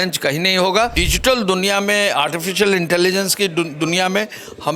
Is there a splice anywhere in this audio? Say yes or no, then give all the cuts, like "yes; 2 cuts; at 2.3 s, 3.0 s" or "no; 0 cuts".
yes; 1 cut; at 1.1 s